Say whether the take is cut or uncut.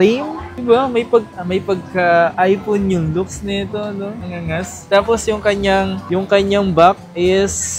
uncut